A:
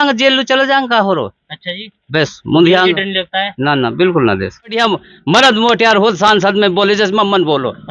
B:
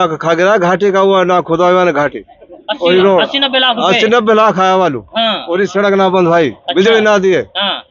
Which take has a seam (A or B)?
A